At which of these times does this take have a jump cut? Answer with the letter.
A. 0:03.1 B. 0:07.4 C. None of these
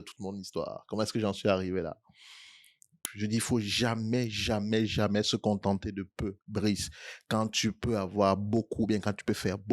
A